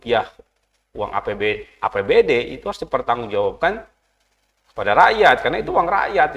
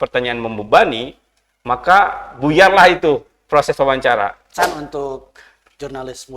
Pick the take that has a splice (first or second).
second